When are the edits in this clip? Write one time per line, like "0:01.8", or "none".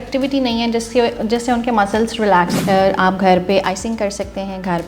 0:02.6